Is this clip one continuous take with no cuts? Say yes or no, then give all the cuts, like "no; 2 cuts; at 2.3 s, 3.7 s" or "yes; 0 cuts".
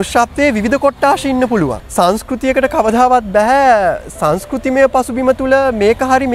no; 1 cut; at 1.8 s